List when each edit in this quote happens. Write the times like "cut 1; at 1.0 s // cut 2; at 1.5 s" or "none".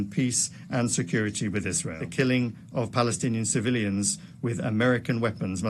cut 1; at 2.0 s